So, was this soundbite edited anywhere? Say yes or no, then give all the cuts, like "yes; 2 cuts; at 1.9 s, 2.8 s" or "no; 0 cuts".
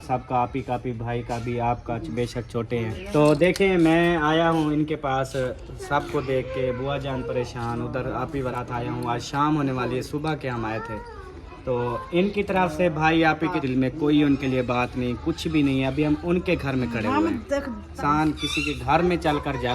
yes; 4 cuts; at 3.0 s, 8.5 s, 13.6 s, 18.0 s